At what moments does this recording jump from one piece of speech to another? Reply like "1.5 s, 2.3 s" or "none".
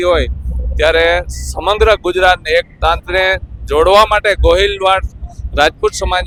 none